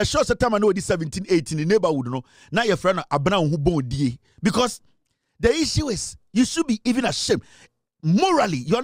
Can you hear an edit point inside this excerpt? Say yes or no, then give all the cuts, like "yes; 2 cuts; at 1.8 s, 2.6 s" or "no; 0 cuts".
no; 0 cuts